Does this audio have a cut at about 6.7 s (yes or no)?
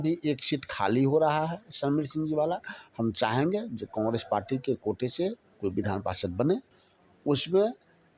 yes